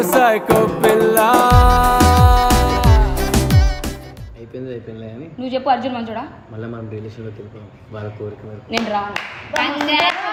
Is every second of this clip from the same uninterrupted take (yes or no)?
yes